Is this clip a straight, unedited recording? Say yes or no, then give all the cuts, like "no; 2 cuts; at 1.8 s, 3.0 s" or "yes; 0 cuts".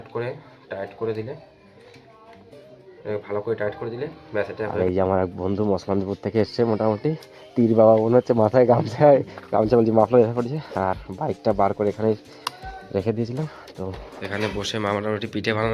no; 2 cuts; at 4.7 s, 14.1 s